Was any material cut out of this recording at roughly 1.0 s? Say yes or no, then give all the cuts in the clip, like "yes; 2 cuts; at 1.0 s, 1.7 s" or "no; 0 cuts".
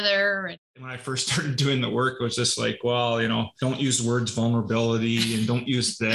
yes; 2 cuts; at 1.0 s, 3.5 s